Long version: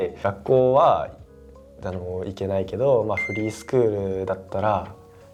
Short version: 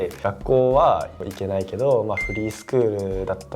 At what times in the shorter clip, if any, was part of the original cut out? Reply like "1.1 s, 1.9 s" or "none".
1.2 s